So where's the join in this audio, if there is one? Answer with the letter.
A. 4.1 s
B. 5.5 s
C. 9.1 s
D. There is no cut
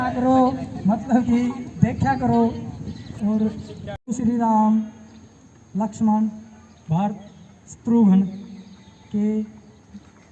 A